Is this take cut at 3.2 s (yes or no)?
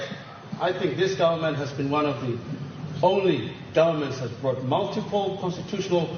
no